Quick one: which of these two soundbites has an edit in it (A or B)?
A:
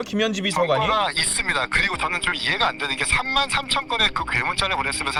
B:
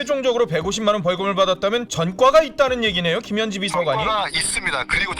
B